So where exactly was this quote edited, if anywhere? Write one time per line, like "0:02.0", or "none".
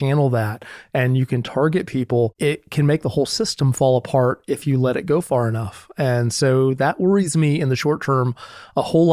0:02.3